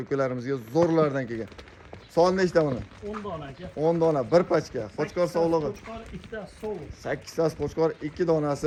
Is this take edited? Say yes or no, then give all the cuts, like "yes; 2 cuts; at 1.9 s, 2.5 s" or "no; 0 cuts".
no; 0 cuts